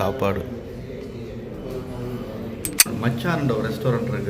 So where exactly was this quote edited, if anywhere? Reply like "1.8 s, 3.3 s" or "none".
2.9 s